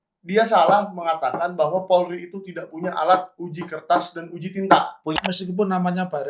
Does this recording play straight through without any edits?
no; 1 cut; at 5.2 s

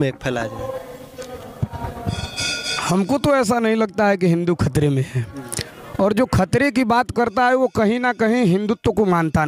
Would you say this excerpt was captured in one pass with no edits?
yes; 0 cuts

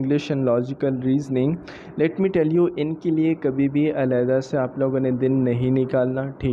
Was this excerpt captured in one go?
yes; 0 cuts

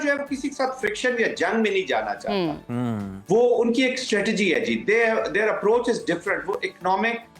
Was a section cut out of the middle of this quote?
no; 0 cuts

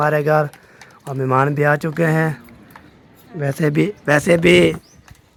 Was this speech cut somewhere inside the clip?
no; 0 cuts

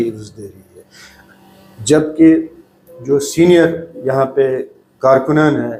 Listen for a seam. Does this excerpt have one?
no; 0 cuts

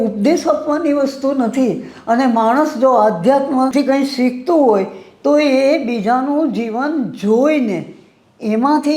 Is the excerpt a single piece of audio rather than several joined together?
no; 1 cut; at 3.7 s

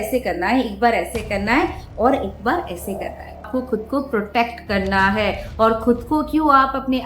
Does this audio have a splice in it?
yes; 1 cut; at 3.5 s

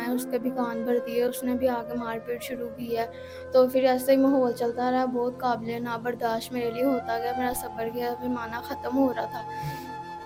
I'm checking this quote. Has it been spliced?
no; 0 cuts

